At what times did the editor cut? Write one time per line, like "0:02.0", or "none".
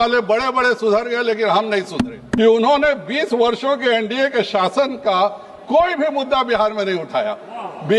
0:02.2